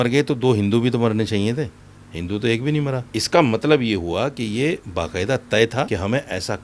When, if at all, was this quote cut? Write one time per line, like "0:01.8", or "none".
0:03.1
0:05.9